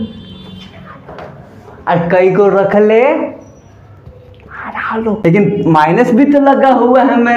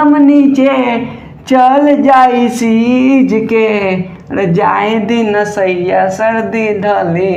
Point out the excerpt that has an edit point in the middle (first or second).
first